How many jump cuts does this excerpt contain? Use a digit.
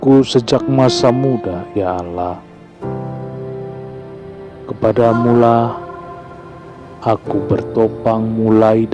0